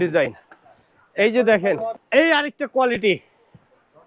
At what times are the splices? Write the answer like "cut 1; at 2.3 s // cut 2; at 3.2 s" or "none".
cut 1; at 2.0 s